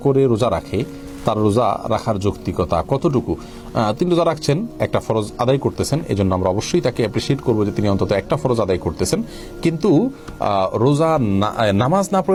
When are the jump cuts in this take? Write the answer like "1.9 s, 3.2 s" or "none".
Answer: none